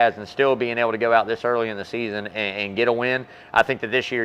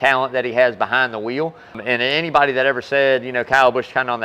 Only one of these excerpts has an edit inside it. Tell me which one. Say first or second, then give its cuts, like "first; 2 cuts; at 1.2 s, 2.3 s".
second; 1 cut; at 1.8 s